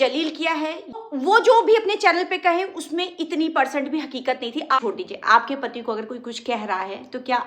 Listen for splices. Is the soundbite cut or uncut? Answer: cut